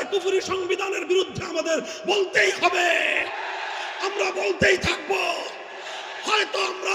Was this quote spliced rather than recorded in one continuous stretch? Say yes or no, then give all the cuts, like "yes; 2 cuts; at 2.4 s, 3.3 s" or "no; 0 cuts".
no; 0 cuts